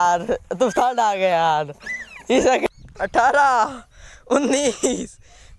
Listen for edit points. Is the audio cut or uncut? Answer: cut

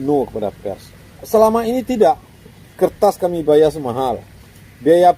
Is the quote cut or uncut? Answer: cut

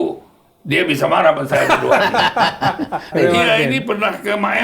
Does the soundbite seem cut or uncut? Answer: cut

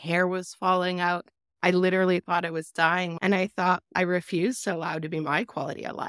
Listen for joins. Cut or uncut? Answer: cut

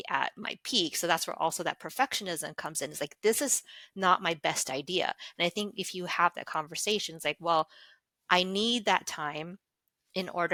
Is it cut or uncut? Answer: uncut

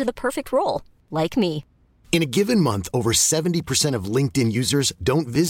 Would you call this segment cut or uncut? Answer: uncut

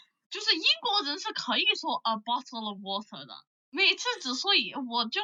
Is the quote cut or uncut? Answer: uncut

